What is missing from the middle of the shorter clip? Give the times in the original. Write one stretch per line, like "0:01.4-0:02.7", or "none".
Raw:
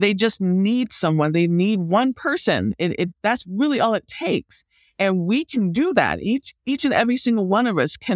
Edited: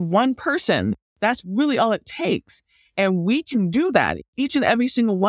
0:02.8-0:03.0
0:06.2-0:06.5